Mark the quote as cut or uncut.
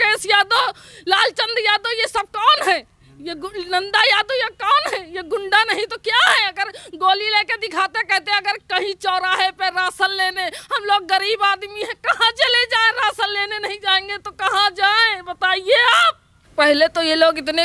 cut